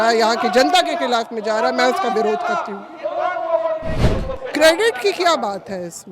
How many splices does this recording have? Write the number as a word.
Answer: one